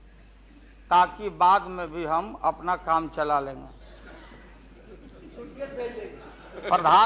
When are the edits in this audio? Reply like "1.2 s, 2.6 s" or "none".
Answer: none